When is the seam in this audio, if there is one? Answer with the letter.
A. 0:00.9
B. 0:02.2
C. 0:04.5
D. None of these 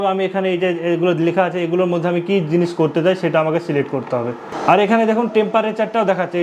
C